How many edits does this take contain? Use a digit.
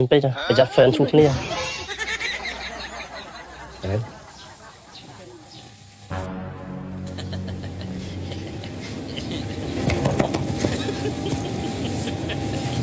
0